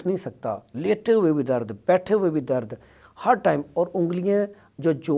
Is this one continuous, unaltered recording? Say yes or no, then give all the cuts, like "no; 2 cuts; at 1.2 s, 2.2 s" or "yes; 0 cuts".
yes; 0 cuts